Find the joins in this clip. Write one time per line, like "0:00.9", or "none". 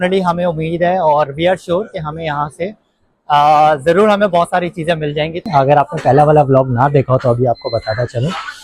0:05.5